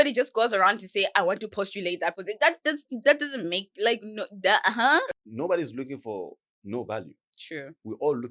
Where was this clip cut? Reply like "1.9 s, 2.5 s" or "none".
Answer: 5.1 s